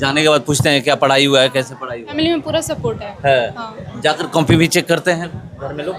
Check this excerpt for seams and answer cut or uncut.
cut